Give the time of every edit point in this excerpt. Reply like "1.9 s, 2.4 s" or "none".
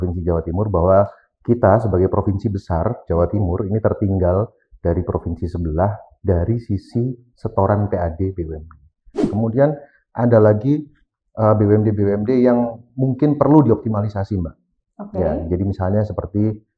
9.2 s

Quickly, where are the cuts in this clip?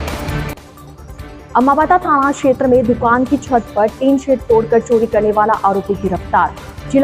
1.3 s

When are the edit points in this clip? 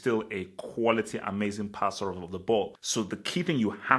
2.8 s

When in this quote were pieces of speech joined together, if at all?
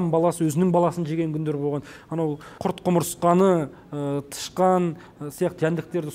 2.5 s

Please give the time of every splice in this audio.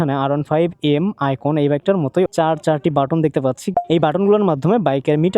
1.9 s, 3.7 s

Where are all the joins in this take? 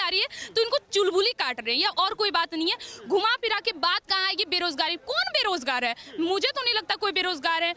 none

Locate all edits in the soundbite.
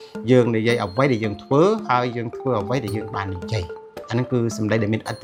none

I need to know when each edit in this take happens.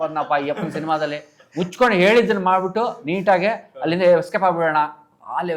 none

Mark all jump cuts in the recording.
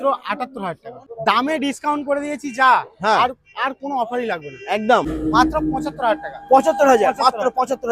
1.0 s, 5.1 s

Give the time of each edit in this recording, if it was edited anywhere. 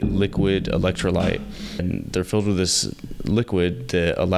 1.8 s

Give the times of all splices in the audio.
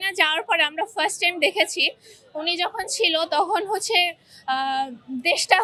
none

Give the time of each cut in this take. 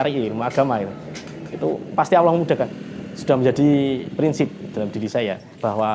2.7 s

